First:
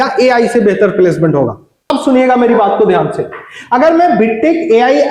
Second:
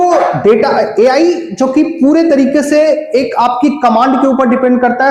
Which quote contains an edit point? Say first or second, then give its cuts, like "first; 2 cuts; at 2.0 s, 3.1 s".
first; 1 cut; at 1.7 s